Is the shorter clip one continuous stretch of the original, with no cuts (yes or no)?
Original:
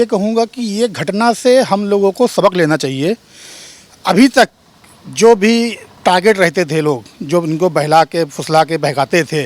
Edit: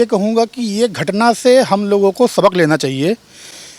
yes